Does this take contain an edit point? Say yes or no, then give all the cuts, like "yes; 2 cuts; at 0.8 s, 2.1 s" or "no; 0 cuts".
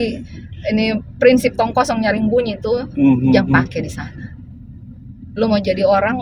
no; 0 cuts